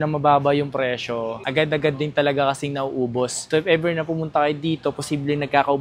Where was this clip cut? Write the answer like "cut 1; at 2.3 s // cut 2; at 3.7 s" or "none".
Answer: cut 1; at 3.4 s